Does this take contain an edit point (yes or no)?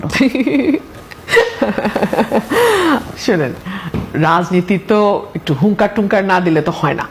no